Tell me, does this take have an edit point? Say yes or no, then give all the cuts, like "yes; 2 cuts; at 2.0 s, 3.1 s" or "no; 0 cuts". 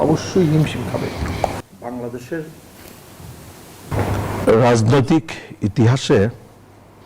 yes; 1 cut; at 1.6 s